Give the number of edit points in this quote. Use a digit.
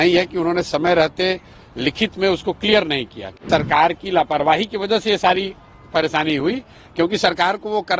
1